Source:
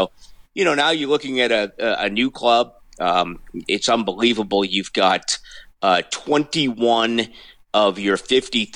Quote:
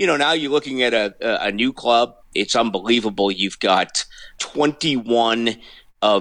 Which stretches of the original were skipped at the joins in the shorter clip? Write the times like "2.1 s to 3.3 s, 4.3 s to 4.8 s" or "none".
2.8 s to 3.6 s, 5.7 s to 6.1 s